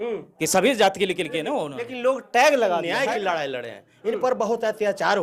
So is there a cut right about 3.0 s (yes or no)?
yes